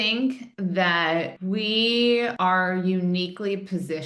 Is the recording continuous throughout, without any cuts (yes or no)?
no